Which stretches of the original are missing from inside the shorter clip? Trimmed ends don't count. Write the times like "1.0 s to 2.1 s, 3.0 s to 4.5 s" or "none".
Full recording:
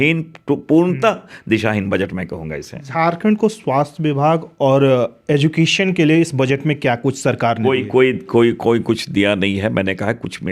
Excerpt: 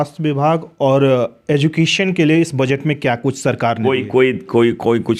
none